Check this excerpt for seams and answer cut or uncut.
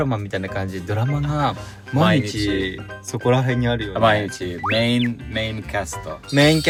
uncut